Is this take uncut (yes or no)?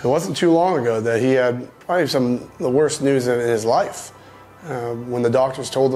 no